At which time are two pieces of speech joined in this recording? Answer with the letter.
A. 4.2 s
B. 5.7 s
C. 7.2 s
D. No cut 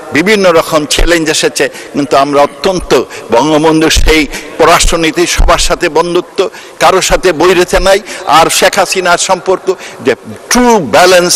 D